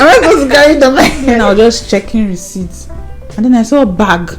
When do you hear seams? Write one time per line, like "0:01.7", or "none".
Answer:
0:01.4